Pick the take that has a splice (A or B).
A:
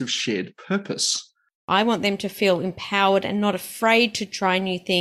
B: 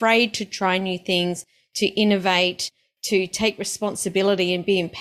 A